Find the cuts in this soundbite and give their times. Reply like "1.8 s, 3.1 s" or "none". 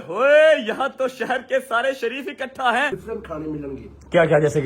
2.9 s